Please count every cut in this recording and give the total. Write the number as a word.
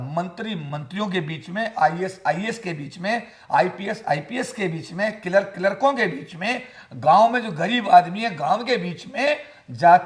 zero